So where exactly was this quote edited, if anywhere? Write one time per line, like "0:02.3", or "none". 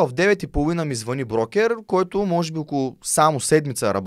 none

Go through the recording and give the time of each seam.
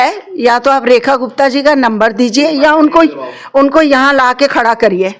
none

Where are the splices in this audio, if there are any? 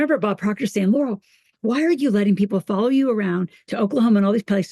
none

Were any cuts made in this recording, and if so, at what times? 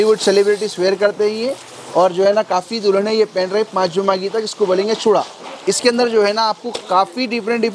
none

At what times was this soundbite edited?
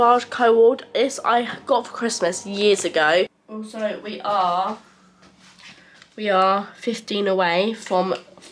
0:03.3

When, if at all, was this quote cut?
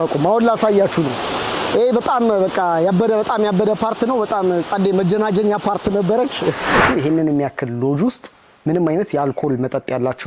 0:06.8

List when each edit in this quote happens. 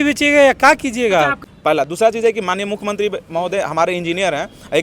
0:01.4

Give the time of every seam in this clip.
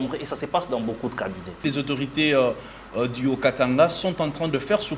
0:01.6

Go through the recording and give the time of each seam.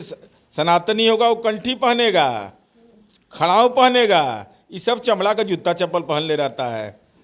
none

